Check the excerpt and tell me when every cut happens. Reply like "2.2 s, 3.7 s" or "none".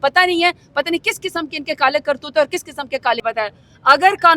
3.2 s